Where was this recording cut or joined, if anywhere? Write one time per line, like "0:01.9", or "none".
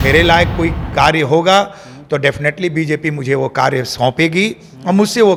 none